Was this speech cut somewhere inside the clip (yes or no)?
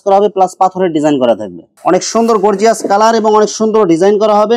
yes